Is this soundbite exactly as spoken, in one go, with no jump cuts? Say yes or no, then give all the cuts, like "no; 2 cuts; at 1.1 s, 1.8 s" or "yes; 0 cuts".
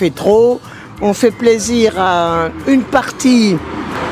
yes; 0 cuts